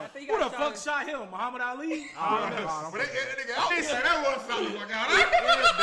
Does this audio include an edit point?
yes; 1 cut; at 3.7 s

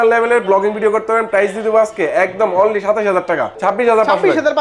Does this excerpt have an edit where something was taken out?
yes; 1 cut; at 3.5 s

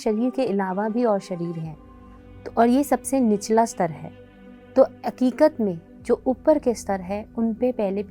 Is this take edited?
no; 0 cuts

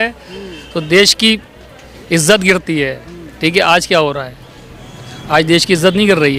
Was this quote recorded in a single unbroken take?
yes; 0 cuts

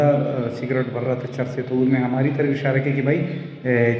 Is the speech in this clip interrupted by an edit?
no; 0 cuts

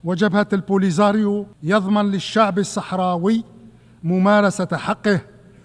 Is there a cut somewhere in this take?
yes; 1 cut; at 1.5 s

